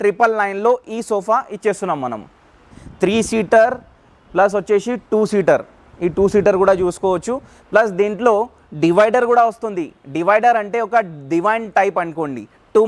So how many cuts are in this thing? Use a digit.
1